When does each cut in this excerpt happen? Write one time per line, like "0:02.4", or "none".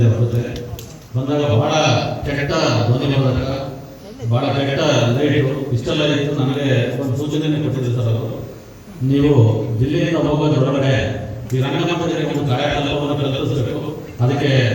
none

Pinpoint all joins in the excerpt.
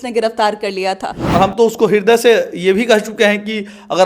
0:01.2

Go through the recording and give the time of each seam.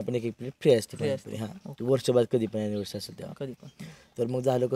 none

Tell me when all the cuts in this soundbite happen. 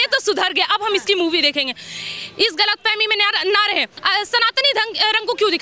0:03.9

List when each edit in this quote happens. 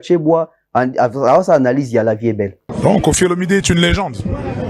0:02.7

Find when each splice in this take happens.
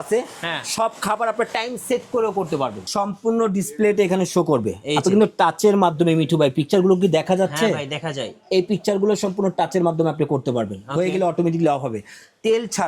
0:02.8

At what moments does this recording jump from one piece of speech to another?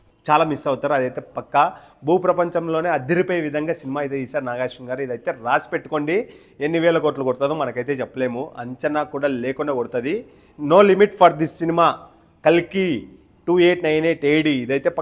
none

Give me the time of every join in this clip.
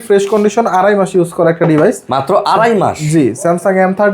none

